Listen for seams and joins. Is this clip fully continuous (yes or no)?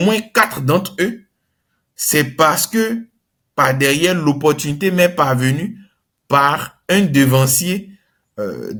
yes